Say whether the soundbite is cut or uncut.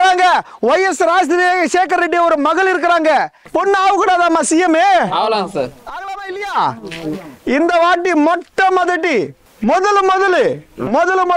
cut